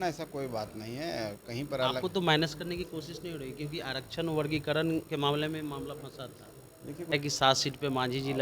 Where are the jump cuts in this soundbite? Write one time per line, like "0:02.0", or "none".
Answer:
0:07.1